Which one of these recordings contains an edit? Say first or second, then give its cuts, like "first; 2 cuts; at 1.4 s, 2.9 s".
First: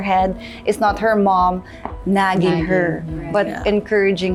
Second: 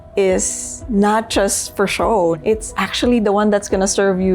second; 1 cut; at 2.4 s